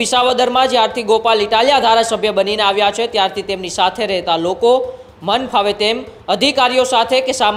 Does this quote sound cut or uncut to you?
uncut